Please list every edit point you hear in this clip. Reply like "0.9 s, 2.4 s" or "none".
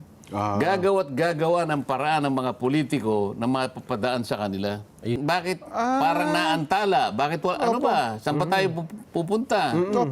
5.2 s